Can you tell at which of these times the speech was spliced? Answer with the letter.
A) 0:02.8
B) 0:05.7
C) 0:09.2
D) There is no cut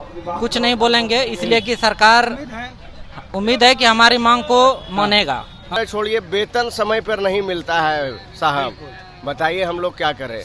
B